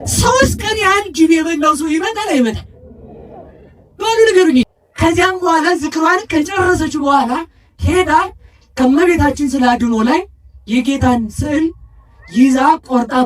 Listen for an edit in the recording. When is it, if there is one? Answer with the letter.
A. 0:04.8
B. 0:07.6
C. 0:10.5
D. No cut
A